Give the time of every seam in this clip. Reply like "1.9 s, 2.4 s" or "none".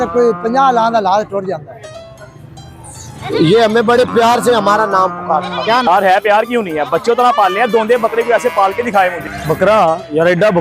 9.2 s